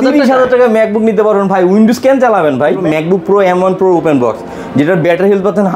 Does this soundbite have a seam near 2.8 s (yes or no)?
yes